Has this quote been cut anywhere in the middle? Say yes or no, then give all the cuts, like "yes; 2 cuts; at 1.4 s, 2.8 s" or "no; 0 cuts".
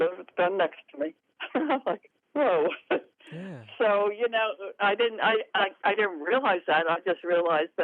no; 0 cuts